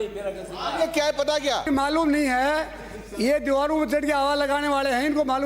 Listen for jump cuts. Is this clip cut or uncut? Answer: cut